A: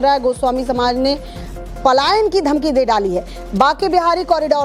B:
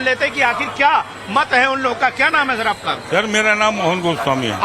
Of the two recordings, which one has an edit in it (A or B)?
B